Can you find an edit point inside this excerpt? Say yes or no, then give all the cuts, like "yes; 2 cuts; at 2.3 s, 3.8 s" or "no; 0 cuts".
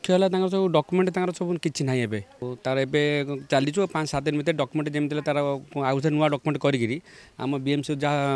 yes; 1 cut; at 2.4 s